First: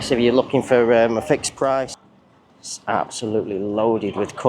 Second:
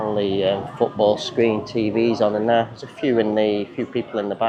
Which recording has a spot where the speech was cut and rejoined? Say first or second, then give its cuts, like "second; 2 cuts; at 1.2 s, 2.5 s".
first; 1 cut; at 2.0 s